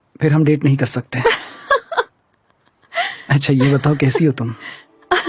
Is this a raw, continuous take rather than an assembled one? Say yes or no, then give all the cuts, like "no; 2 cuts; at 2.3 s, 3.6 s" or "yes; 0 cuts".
yes; 0 cuts